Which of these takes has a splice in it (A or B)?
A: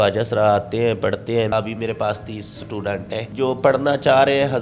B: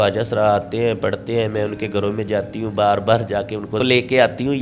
A